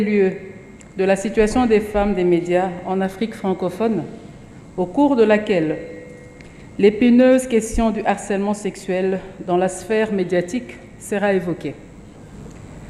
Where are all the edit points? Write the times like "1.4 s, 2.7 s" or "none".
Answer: none

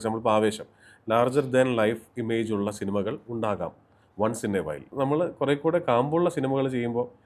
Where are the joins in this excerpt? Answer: 4.9 s

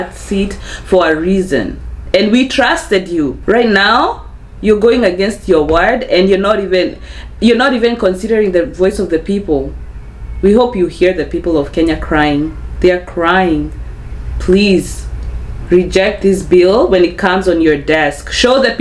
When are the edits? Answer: 3.4 s

